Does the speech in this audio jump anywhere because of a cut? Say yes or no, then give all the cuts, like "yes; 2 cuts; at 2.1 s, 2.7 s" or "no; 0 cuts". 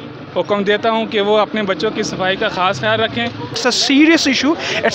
yes; 1 cut; at 3.6 s